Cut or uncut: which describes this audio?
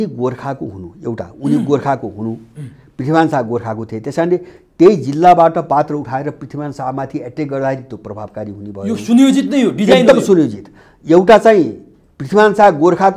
uncut